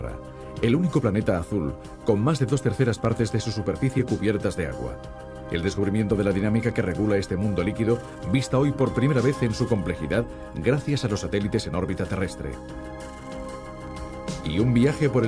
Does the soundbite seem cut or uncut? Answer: cut